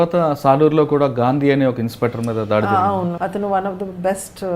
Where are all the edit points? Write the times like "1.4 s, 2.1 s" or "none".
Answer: 3.1 s

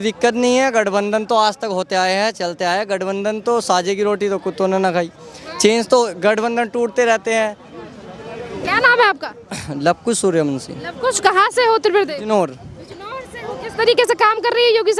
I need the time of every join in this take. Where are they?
none

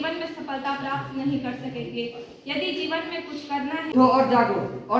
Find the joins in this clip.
3.9 s

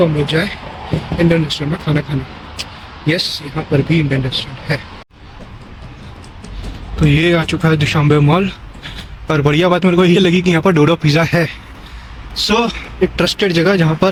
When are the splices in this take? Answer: none

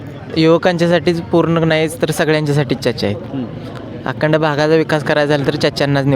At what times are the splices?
none

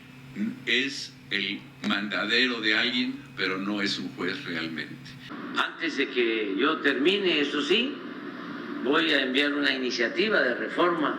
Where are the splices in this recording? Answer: 5.3 s

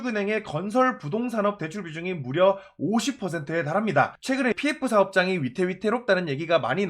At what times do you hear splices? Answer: 4.5 s

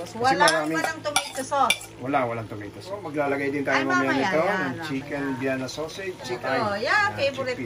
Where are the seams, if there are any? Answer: 3.0 s, 6.4 s

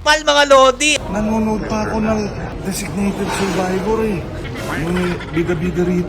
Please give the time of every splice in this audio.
0.9 s, 2.5 s, 4.4 s

